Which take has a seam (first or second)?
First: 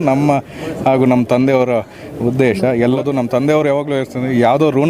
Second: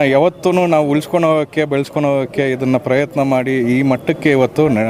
first